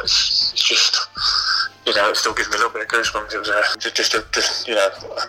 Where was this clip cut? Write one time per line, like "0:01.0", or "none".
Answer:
0:03.8

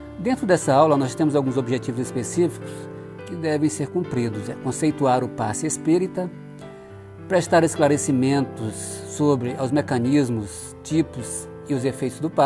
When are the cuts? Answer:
none

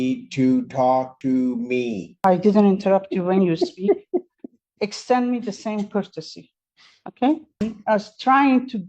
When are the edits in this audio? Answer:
0:02.1
0:07.6

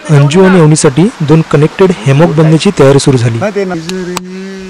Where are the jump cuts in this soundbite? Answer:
0:03.8

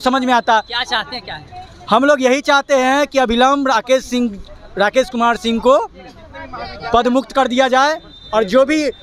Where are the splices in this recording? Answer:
none

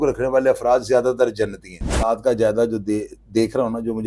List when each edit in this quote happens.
0:02.0

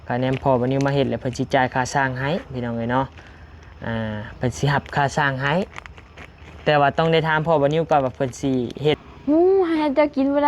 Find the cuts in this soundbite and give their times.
0:09.0

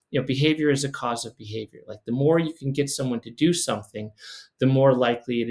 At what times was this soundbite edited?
none

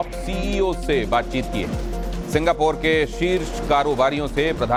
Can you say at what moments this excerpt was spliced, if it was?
none

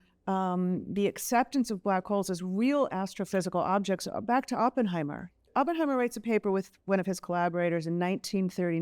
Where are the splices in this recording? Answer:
0:05.5

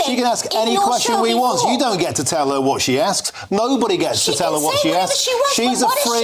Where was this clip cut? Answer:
none

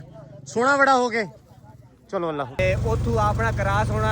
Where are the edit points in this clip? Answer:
0:02.6

